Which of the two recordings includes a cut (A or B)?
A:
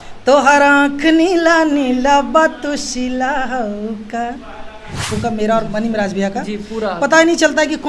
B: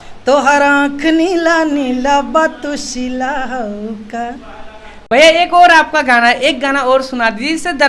A